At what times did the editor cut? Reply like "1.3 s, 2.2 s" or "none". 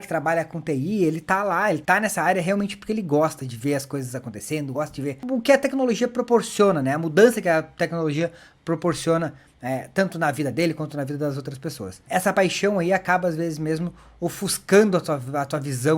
1.8 s, 5.2 s, 11.9 s